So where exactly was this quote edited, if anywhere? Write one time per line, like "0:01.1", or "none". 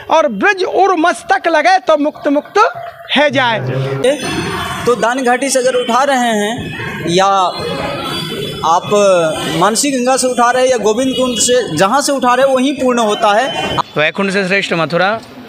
0:04.0
0:13.8